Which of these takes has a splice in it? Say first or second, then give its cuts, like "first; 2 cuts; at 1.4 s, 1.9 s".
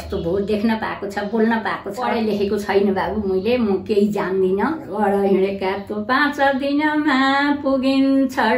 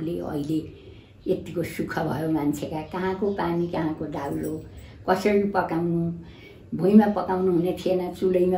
first; 2 cuts; at 2.1 s, 4.8 s